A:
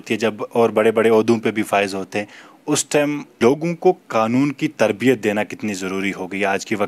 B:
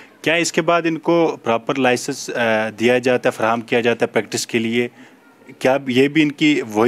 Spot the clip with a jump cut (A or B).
A